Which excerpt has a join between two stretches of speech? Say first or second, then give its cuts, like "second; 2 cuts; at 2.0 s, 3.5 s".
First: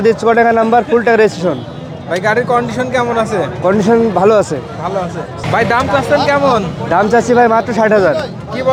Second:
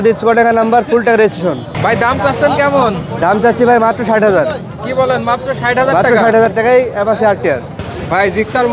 second; 2 cuts; at 1.7 s, 7.8 s